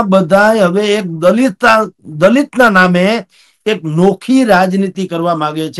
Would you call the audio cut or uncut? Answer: uncut